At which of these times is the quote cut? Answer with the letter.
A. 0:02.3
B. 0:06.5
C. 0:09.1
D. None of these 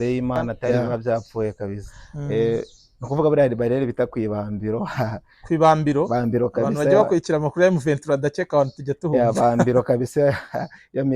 A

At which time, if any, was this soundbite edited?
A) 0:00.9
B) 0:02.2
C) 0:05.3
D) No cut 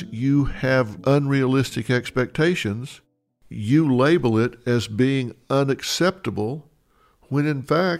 A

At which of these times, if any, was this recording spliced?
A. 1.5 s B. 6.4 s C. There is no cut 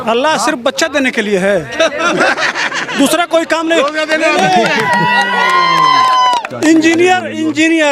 C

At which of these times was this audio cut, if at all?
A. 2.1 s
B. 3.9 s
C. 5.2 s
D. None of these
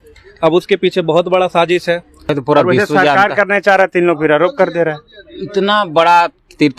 A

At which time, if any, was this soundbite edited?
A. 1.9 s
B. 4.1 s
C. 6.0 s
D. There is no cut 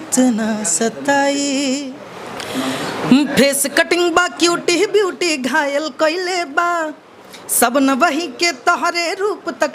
A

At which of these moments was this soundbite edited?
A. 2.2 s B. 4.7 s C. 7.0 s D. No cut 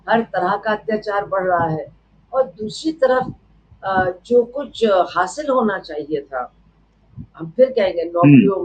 D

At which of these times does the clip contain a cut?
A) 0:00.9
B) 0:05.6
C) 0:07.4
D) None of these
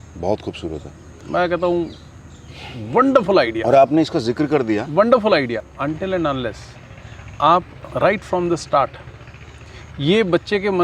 B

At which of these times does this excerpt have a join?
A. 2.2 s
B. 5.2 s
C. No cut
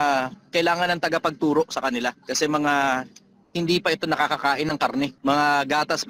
B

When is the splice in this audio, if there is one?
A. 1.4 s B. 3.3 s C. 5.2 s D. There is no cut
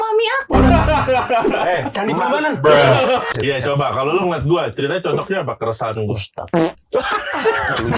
B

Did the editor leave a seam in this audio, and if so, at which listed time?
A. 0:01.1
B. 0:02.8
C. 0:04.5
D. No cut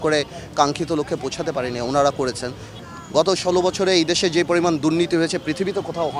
B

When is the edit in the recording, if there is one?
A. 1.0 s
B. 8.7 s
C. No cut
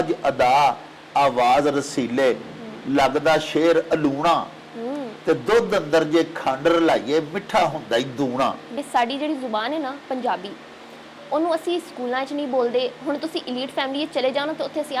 B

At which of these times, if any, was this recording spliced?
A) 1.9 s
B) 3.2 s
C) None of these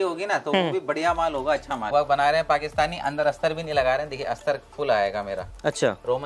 A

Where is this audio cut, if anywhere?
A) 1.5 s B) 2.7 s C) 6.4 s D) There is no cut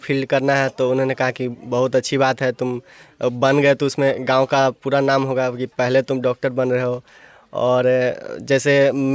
D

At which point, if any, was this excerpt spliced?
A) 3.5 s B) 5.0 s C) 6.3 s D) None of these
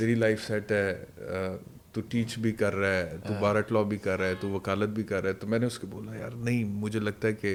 D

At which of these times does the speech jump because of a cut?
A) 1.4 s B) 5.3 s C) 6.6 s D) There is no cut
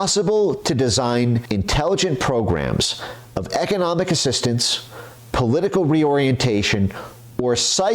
A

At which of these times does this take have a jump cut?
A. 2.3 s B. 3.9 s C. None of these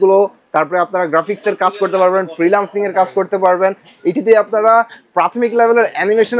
C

